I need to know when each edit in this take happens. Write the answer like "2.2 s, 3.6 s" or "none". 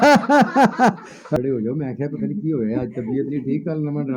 1.3 s